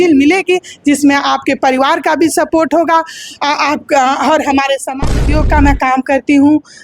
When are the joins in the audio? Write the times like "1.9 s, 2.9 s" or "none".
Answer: 5.2 s